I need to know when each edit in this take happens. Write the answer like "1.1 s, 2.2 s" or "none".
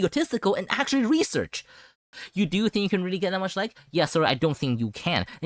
2.1 s